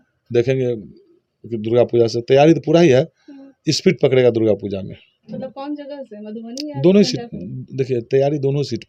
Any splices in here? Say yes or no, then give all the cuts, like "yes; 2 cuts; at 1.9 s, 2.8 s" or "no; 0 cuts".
no; 0 cuts